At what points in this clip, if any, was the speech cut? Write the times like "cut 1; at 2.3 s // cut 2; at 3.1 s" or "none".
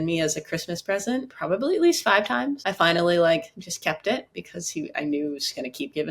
cut 1; at 1.3 s // cut 2; at 2.6 s